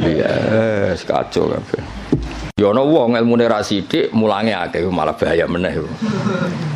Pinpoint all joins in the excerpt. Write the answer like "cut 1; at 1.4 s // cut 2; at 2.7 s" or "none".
cut 1; at 2.5 s